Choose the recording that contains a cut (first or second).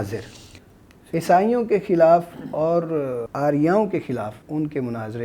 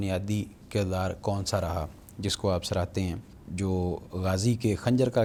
first